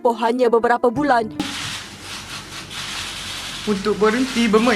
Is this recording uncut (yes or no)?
no